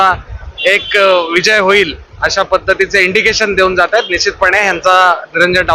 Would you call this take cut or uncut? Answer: uncut